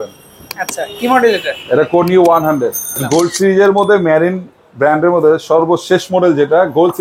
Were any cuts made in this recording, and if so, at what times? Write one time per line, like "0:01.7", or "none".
0:03.0